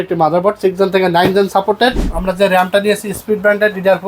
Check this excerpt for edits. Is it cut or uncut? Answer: cut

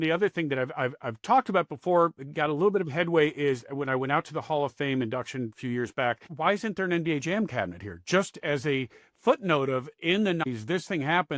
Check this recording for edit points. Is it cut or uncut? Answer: cut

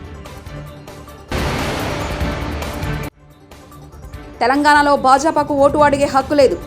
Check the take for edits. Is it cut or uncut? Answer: cut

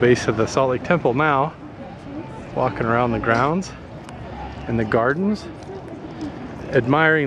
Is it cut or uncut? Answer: uncut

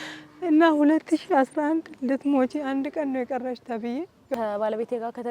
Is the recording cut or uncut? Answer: cut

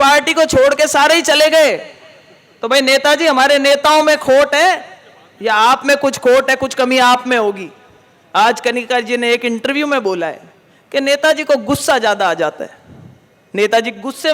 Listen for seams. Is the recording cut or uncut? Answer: uncut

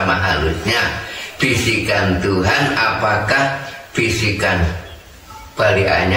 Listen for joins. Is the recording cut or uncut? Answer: uncut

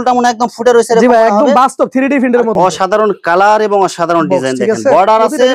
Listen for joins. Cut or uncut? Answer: cut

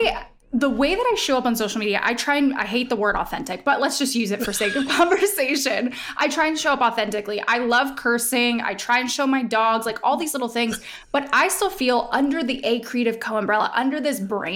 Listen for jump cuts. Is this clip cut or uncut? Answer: uncut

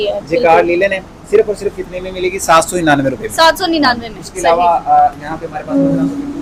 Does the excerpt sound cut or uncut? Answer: uncut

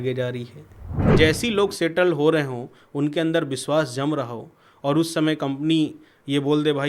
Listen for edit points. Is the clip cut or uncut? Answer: cut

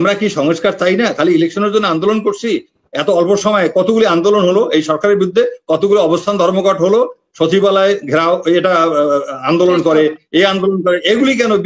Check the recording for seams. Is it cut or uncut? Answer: uncut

